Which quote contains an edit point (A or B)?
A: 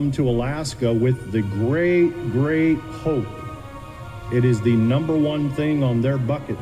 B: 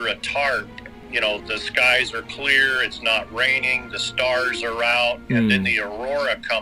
B